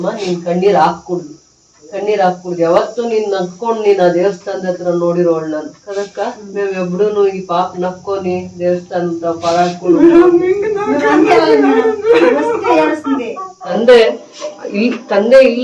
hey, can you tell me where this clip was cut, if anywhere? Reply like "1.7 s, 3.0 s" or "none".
13.6 s